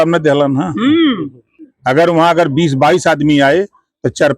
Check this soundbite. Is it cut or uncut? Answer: cut